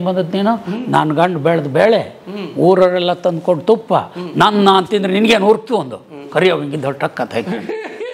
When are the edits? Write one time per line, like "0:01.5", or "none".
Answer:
none